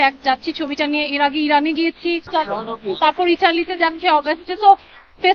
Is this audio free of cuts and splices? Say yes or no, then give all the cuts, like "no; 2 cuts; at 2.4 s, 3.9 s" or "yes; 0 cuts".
no; 1 cut; at 2.2 s